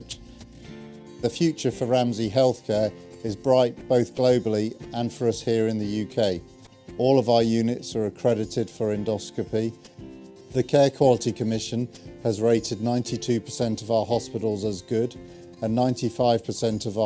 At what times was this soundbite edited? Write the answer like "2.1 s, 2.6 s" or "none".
none